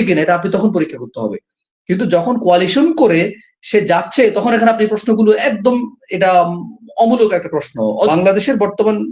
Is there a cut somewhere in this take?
yes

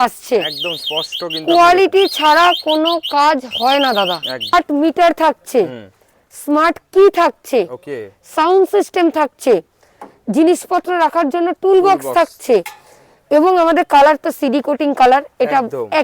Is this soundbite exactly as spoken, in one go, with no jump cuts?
no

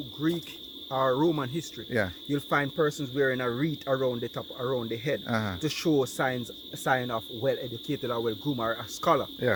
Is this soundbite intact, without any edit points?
yes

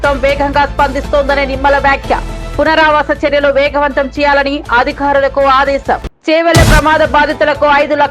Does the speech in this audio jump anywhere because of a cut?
yes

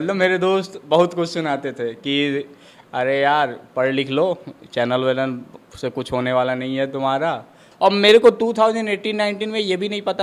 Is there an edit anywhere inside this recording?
yes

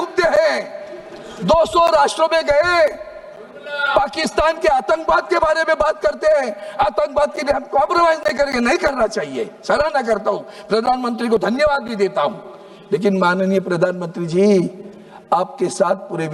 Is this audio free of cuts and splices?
yes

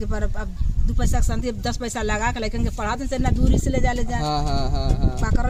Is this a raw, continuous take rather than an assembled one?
yes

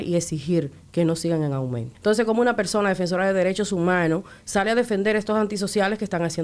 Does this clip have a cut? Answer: yes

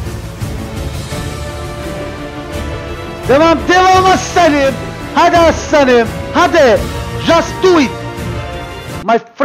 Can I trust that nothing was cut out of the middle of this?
yes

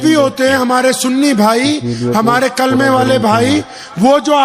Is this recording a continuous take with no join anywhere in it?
yes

